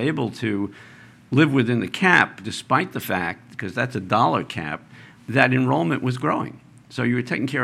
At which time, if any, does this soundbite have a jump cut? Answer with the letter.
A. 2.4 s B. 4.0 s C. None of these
A